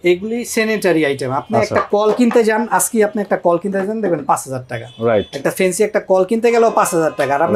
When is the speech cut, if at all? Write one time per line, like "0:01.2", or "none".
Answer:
none